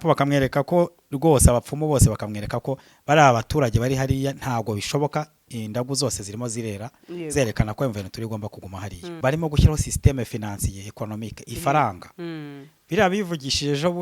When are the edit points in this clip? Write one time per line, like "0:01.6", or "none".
0:09.1